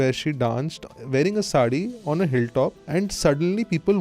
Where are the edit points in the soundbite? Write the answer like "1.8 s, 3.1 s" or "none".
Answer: 2.8 s